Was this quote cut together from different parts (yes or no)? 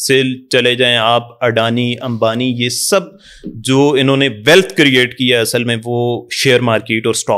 no